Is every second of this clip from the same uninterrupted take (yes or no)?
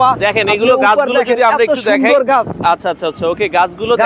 yes